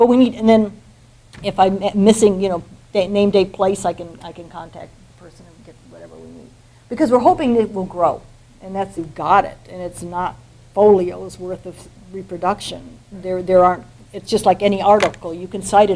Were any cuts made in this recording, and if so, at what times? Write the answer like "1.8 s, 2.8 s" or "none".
none